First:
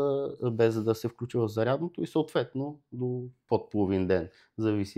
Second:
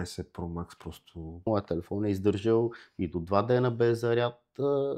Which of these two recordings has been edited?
second; 1 cut; at 1.5 s

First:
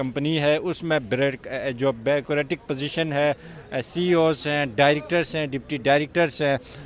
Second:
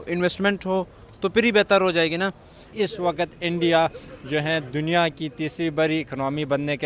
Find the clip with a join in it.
second; 1 cut; at 2.6 s

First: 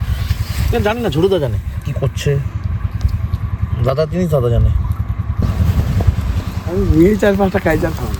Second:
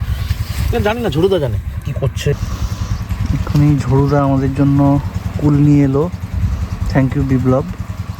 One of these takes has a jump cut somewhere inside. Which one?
second; 1 cut; at 2.3 s

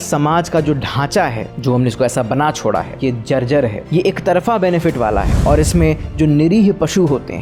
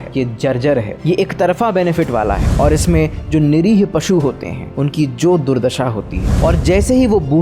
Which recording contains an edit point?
second; 1 cut; at 6.3 s

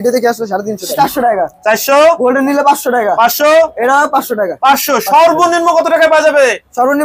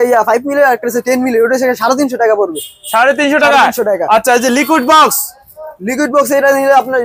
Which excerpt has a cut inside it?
first; 1 cut; at 0.9 s

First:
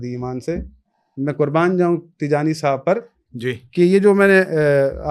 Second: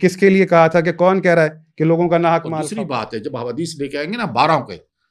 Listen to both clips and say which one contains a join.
second; 1 cut; at 2.7 s

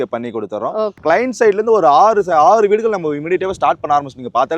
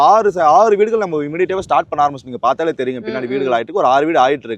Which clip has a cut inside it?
first; 1 cut; at 1.0 s

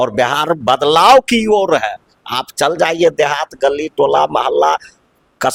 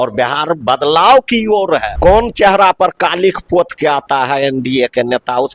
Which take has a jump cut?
second; 1 cut; at 1.9 s

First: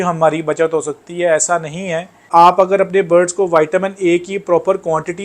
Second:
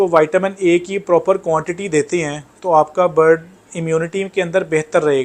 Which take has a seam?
first; 1 cut; at 2.3 s

